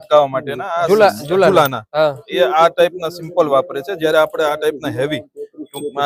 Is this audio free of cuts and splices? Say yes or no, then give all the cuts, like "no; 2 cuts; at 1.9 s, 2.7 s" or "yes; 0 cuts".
yes; 0 cuts